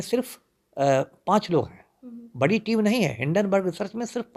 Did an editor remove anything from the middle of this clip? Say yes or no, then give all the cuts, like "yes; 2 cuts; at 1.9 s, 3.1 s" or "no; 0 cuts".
no; 0 cuts